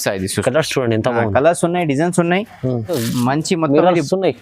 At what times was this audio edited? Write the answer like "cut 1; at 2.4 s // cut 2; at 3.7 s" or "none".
cut 1; at 3.0 s